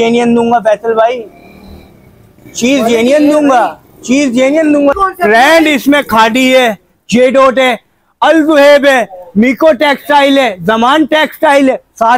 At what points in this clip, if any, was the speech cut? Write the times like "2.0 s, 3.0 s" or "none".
5.0 s